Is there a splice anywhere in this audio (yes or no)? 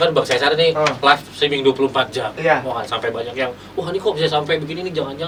no